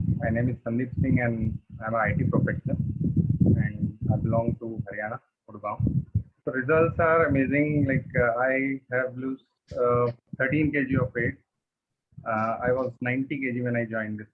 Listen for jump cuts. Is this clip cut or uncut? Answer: cut